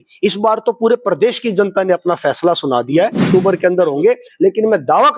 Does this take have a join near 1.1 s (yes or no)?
no